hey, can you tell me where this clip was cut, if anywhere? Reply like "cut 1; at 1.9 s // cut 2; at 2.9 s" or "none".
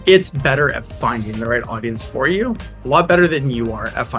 none

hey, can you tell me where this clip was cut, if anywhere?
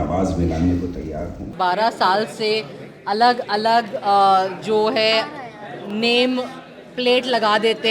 cut 1; at 1.5 s

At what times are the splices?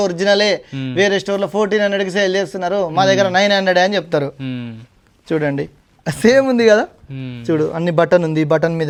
none

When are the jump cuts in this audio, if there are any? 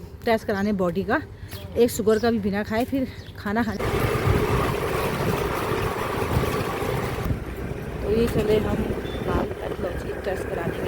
cut 1; at 3.7 s

